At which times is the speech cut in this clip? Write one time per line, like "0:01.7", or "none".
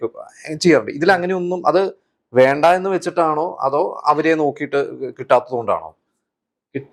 none